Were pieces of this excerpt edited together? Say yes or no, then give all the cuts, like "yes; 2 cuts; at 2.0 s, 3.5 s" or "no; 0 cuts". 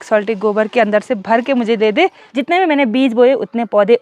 yes; 1 cut; at 2.3 s